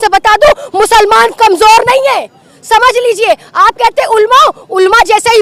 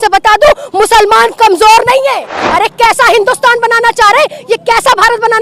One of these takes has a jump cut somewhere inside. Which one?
second; 1 cut; at 2.5 s

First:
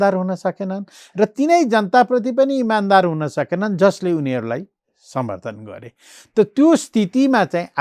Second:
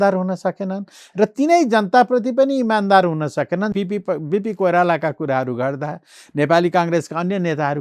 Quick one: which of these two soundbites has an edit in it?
second; 1 cut; at 3.7 s

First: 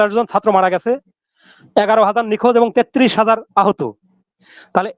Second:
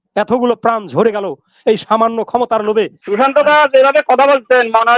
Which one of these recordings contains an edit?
second; 1 cut; at 3.0 s

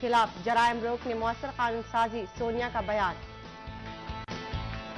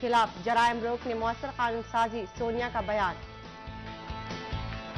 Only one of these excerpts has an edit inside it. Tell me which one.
second; 1 cut; at 3.9 s

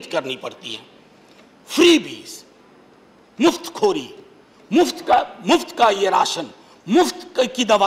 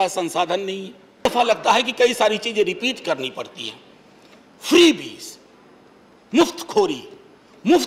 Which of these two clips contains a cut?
second; 1 cut; at 1.3 s

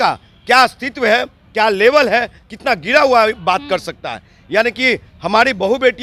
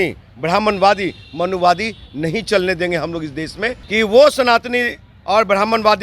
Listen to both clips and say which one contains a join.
second; 1 cut; at 3.8 s

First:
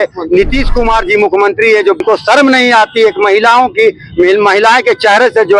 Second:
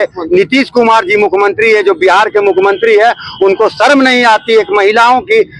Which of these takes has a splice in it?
first; 1 cut; at 2.0 s

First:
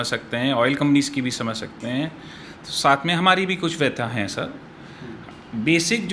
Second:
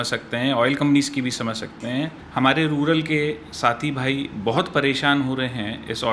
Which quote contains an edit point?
second; 1 cut; at 2.2 s

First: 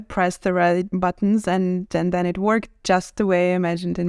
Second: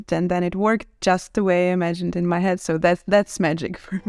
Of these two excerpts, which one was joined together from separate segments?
first; 1 cut; at 0.9 s

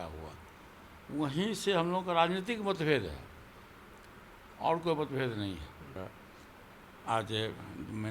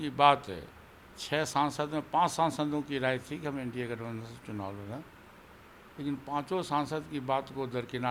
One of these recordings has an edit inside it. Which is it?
first; 1 cut; at 5.9 s

